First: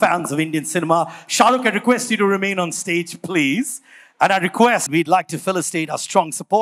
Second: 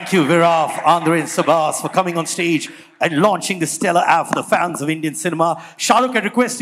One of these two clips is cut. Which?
first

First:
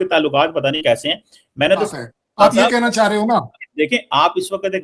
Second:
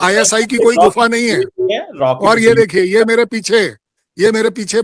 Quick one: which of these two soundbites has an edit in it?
first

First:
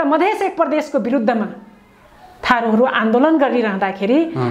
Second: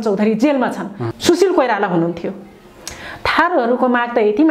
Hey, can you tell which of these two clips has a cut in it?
second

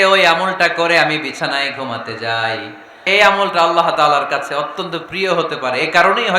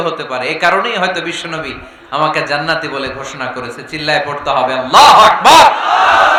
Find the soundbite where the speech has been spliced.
first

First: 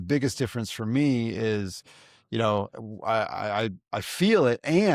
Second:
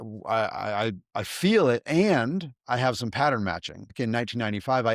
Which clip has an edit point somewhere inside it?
second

